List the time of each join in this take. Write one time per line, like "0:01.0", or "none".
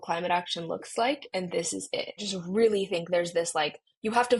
0:02.2